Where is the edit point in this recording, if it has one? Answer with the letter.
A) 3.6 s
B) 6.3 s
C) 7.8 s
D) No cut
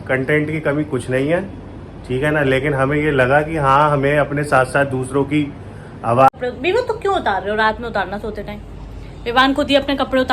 B